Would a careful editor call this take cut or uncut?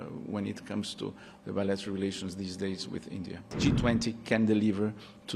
cut